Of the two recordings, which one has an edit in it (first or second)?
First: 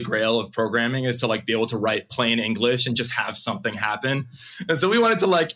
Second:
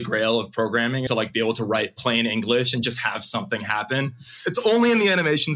second